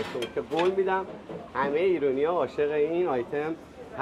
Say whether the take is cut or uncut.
uncut